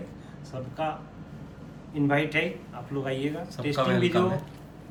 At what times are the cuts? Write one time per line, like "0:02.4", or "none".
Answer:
none